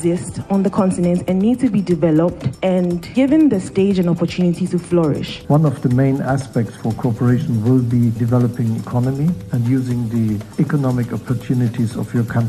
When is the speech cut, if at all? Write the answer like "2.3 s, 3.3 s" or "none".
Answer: 2.8 s, 5.3 s, 8.2 s, 9.5 s, 10.5 s